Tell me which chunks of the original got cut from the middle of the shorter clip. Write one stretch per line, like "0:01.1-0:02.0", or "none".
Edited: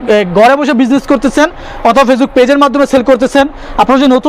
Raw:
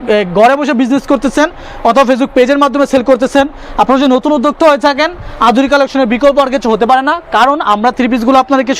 none